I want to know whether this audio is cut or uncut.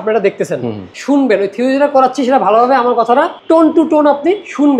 cut